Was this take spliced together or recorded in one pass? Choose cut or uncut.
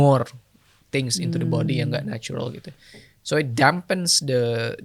uncut